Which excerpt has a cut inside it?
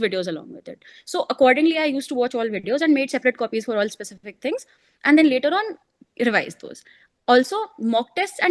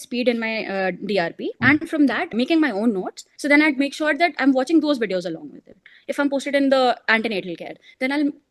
second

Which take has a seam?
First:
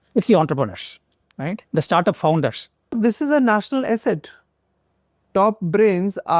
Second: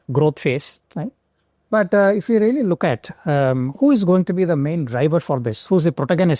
first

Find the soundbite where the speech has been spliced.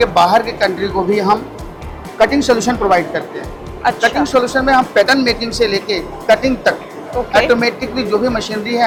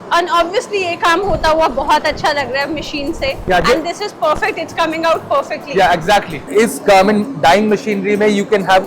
second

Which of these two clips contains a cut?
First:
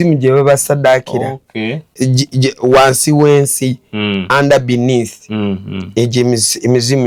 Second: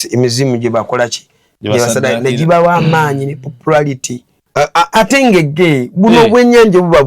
second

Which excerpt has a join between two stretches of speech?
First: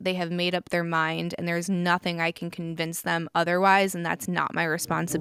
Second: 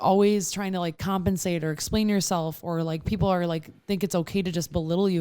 second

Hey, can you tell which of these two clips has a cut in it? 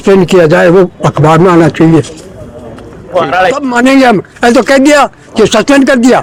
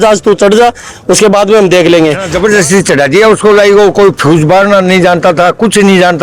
second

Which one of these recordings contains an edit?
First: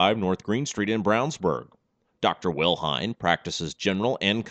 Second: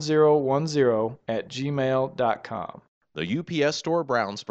second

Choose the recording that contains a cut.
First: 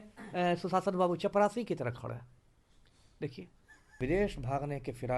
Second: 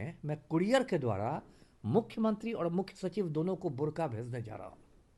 first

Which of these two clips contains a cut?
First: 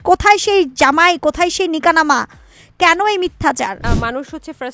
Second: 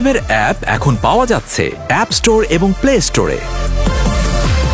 first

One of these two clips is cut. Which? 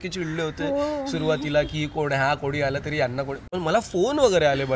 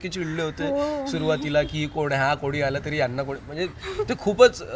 first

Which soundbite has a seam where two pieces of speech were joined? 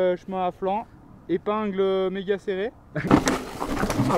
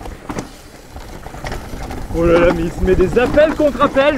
first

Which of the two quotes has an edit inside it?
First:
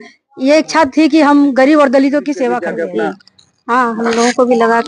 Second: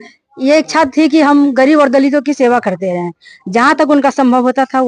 first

